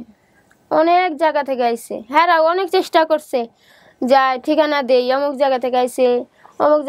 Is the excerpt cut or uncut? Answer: uncut